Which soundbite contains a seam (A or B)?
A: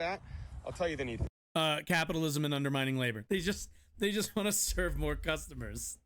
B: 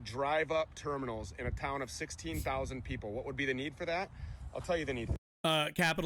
A